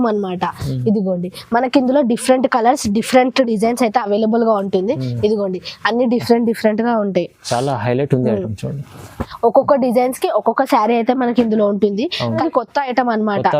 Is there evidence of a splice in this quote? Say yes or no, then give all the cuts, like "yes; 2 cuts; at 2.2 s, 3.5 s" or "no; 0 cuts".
yes; 1 cut; at 12.4 s